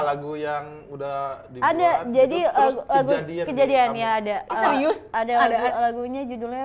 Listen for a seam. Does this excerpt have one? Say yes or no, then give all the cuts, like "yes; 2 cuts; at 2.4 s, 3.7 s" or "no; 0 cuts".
no; 0 cuts